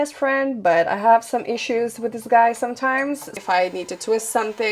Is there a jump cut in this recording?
yes; 1 cut; at 3.4 s

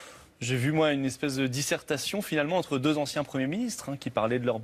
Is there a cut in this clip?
yes; 1 cut; at 3.6 s

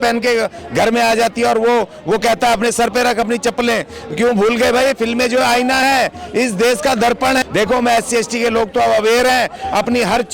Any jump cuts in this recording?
yes; 1 cut; at 7.4 s

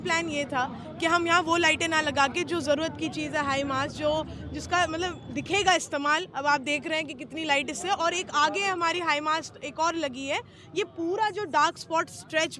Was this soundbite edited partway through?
no; 0 cuts

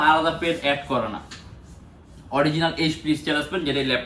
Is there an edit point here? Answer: no; 0 cuts

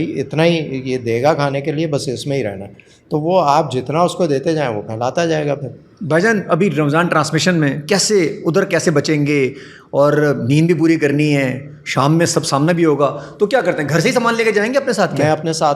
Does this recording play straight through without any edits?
yes; 0 cuts

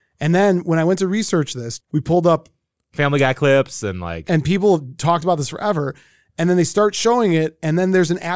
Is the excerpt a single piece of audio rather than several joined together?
no; 1 cut; at 1.6 s

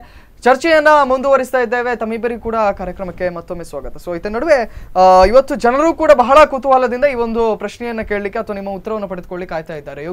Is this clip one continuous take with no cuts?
yes; 0 cuts

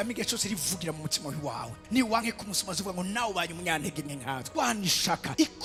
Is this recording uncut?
yes; 0 cuts

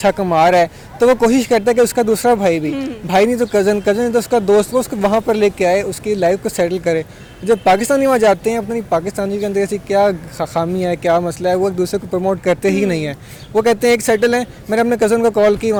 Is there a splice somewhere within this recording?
no; 0 cuts

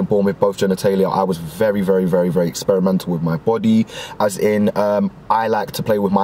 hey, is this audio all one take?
yes; 0 cuts

